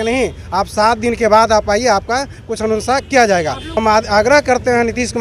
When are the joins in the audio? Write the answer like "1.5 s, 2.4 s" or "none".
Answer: 3.7 s